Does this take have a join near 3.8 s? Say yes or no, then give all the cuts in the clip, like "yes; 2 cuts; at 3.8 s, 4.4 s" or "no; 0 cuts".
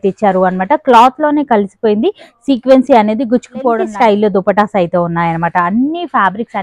yes; 1 cut; at 3.8 s